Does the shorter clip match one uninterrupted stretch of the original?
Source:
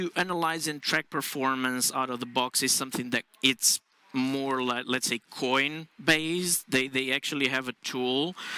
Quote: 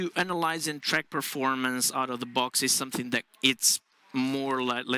yes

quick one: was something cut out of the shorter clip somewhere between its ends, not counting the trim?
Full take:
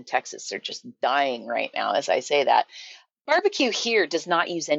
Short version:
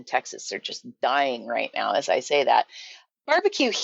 no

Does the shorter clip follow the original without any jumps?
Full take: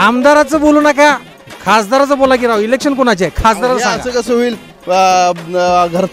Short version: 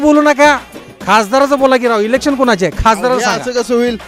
yes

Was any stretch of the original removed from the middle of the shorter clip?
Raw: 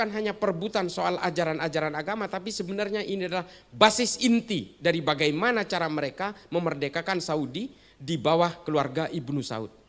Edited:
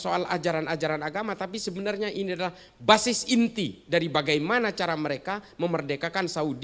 no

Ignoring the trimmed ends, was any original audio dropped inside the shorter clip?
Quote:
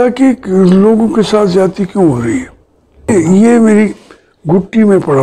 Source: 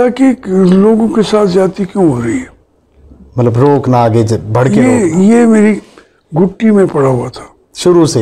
yes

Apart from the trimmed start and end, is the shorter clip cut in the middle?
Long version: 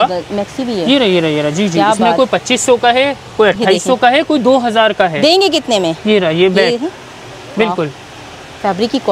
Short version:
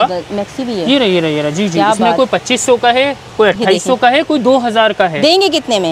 no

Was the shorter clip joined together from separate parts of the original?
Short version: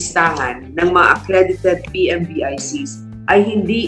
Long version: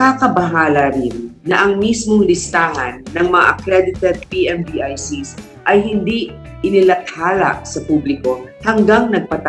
no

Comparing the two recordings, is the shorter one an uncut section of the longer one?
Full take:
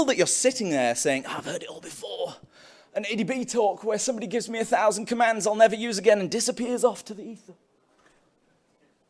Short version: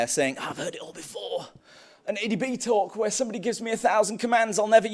yes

